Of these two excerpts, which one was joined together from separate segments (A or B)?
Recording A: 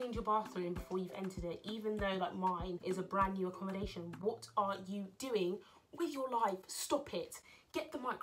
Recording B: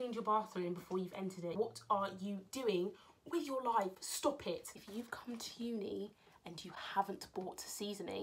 B